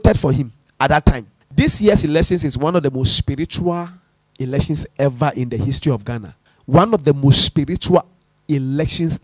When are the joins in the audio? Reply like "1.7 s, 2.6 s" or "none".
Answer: 1.3 s